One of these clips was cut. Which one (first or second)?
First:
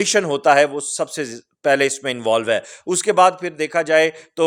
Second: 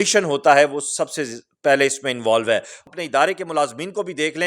second